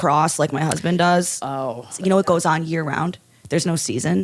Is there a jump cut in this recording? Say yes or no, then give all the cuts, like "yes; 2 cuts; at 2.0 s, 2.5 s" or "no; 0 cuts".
yes; 1 cut; at 2.0 s